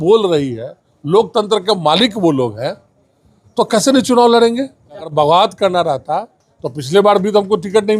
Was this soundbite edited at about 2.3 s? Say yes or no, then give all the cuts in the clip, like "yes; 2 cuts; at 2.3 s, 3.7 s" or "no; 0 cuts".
no; 1 cut; at 5.1 s